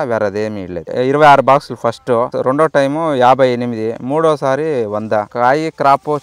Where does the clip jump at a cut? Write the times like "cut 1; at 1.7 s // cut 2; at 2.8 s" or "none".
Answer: cut 1; at 0.9 s // cut 2; at 5.3 s